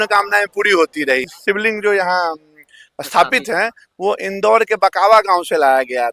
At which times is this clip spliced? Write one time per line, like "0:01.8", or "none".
0:01.3